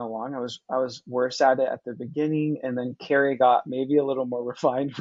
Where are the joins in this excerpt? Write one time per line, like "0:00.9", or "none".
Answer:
none